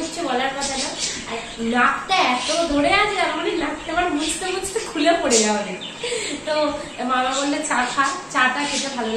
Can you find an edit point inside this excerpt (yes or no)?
no